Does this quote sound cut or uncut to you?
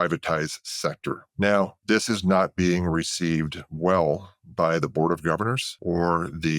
cut